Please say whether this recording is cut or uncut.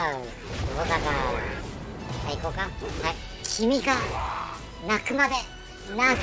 cut